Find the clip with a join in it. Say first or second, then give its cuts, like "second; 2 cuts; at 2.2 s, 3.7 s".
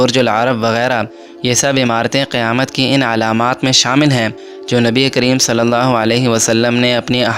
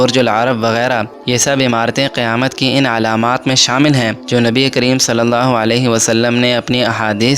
second; 2 cuts; at 1.1 s, 4.2 s